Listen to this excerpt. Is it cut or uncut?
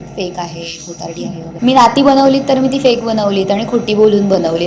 cut